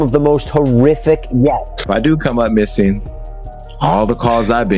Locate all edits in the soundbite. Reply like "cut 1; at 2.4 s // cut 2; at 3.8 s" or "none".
cut 1; at 1.8 s